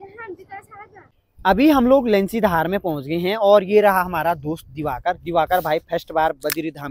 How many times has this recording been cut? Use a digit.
1